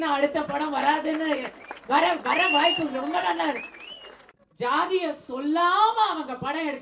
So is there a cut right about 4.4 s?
yes; 1 cut; at 4.4 s

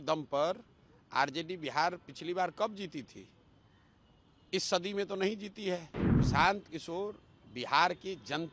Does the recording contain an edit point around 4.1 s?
no; 1 cut; at 6.0 s

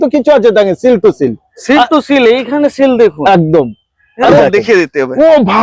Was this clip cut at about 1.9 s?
no; 1 cut; at 4.4 s

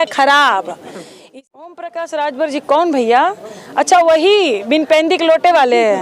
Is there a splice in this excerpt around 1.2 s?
yes; 1 cut; at 1.2 s

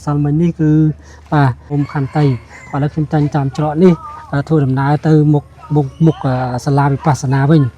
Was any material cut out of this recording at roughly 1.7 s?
yes; 1 cut; at 1.7 s

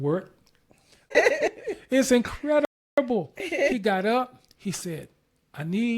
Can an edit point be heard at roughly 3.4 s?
no; 1 cut; at 1.1 s

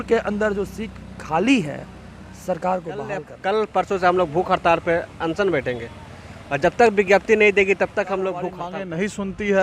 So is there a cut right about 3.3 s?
yes; 2 cuts; at 3.3 s, 8.6 s

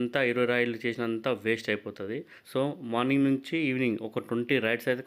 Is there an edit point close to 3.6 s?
no; 1 cut; at 2.3 s

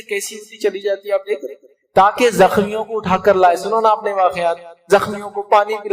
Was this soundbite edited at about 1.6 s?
yes; 1 cut; at 1.6 s

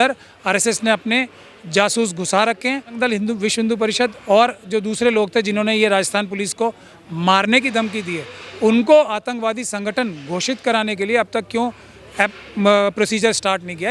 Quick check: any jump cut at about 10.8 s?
no; 1 cut; at 2.9 s

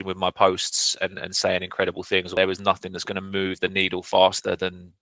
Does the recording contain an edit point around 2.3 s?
yes; 1 cut; at 2.3 s

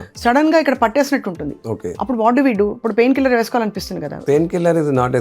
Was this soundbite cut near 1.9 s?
yes; 2 cuts; at 1.9 s, 4.2 s

